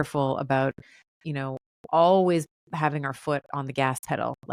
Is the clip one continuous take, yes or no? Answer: yes